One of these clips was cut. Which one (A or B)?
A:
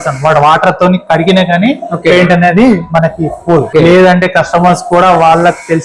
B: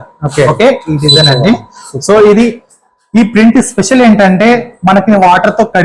A